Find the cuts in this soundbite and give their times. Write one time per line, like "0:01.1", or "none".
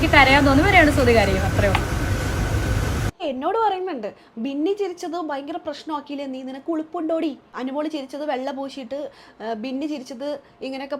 0:03.2
0:07.6